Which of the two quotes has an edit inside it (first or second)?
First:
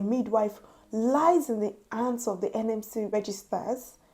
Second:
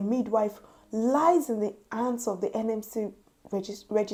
first